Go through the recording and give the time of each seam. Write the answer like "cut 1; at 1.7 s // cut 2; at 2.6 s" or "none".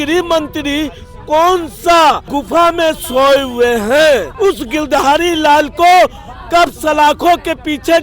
cut 1; at 2.2 s // cut 2; at 4.3 s